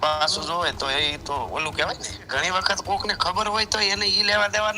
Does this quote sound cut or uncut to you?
cut